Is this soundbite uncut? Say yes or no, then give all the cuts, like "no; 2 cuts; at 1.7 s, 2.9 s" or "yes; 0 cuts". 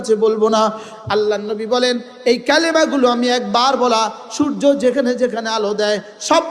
no; 1 cut; at 0.9 s